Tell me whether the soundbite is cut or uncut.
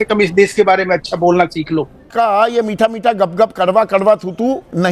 cut